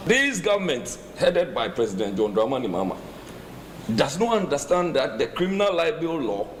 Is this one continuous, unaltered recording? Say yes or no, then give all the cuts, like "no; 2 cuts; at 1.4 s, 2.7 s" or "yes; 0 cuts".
yes; 0 cuts